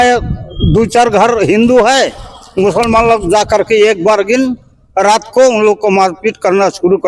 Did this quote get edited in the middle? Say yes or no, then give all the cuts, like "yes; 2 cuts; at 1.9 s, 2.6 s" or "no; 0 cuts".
no; 0 cuts